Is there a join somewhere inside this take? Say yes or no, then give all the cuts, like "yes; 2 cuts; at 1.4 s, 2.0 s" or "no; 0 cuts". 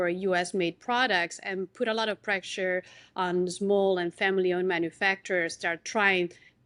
no; 0 cuts